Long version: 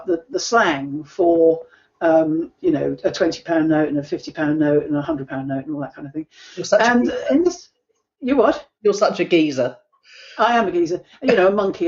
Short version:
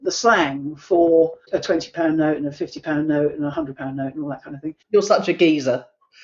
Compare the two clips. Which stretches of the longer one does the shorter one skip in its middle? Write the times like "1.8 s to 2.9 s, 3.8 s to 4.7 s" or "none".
1.8 s to 3.0 s, 6.3 s to 8.7 s